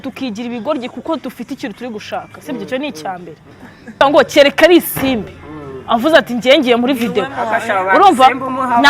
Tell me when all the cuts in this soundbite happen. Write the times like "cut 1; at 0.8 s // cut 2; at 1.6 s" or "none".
cut 1; at 4.0 s